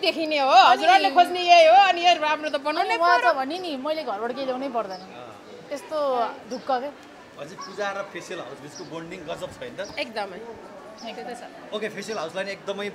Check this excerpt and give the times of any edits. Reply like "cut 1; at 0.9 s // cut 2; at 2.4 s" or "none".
none